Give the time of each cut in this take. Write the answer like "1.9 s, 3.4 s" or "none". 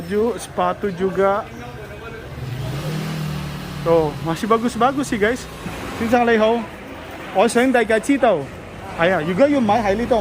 5.8 s